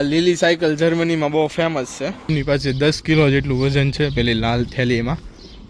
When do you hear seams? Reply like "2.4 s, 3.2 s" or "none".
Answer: 2.3 s